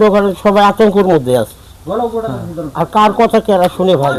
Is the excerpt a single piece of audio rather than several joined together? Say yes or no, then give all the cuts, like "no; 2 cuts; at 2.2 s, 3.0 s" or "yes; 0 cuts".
yes; 0 cuts